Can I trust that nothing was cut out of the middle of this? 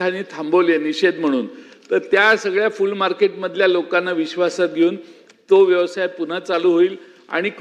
yes; 0 cuts

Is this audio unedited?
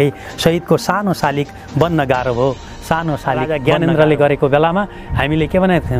no; 1 cut; at 3.6 s

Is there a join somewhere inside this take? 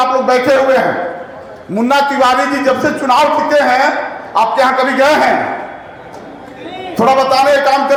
no; 0 cuts

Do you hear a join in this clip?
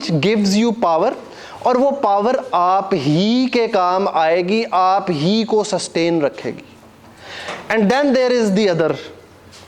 no; 0 cuts

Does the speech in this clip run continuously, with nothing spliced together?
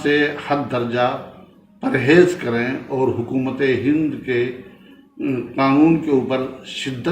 yes; 0 cuts

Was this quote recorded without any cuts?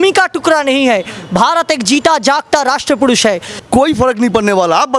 no; 1 cut; at 3.5 s

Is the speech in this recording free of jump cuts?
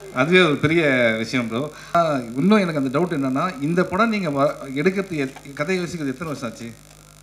no; 1 cut; at 1.9 s

